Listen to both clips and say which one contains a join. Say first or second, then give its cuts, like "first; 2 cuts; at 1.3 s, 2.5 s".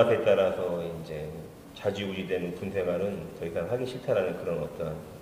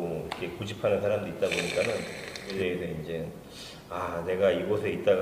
second; 1 cut; at 2.4 s